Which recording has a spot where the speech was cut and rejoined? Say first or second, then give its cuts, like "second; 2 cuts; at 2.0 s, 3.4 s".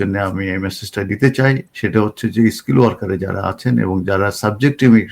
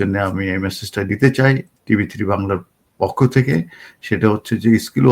first; 1 cut; at 1.7 s